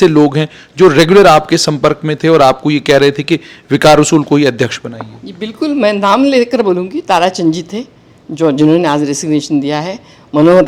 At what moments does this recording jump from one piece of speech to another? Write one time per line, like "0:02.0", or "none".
none